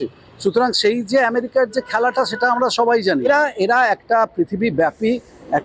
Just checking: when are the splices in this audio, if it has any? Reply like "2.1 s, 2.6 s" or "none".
3.3 s